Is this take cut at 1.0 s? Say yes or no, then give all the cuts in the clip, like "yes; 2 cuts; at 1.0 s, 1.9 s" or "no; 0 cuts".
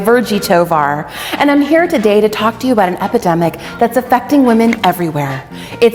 no; 0 cuts